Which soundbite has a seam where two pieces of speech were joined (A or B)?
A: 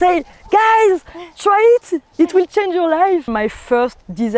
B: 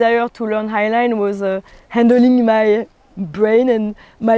A